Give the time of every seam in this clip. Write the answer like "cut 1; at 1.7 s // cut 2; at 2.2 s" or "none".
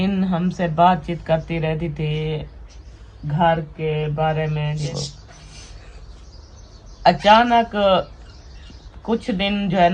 cut 1; at 4.8 s

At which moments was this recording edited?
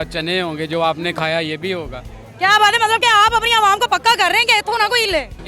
none

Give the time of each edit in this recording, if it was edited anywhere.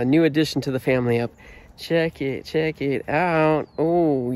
none

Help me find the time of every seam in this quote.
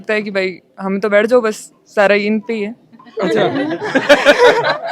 none

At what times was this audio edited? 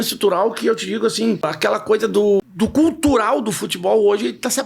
cut 1; at 1.5 s // cut 2; at 2.4 s

